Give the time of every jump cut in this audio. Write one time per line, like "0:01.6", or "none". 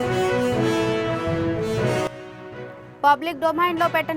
0:02.2